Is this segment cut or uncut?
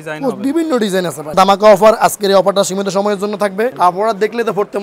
cut